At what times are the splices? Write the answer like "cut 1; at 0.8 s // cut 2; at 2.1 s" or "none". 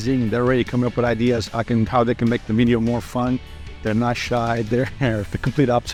none